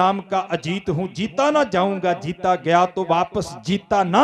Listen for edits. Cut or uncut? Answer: uncut